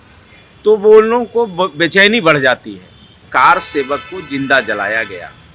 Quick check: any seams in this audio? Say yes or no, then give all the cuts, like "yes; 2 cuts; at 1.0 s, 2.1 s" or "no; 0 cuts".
yes; 1 cut; at 3.3 s